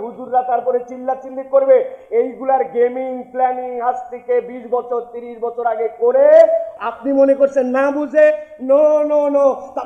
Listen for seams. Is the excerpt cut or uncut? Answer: cut